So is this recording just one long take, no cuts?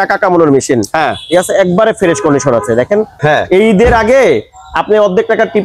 no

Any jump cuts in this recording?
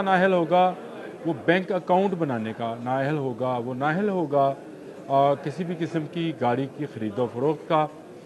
no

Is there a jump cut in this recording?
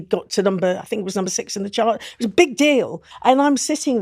yes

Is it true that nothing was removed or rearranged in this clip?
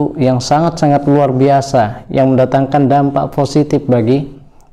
yes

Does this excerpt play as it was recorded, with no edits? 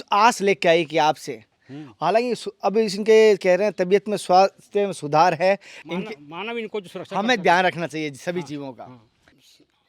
no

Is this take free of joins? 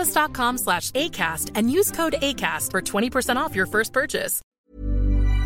no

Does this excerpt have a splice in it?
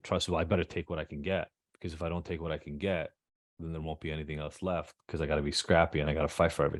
no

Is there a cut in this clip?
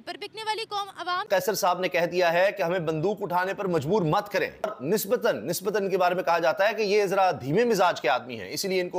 yes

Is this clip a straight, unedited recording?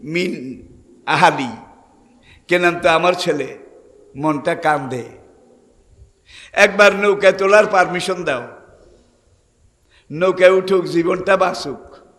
yes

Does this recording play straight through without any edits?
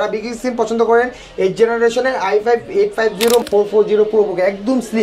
no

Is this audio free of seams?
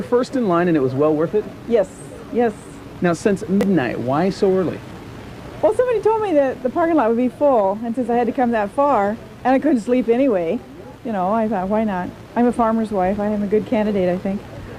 yes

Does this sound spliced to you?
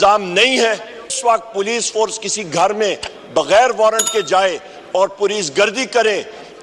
yes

